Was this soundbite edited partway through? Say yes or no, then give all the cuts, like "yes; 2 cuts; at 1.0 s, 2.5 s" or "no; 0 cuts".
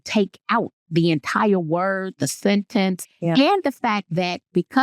yes; 1 cut; at 3.1 s